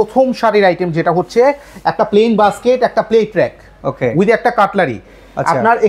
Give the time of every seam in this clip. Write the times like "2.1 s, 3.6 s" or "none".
none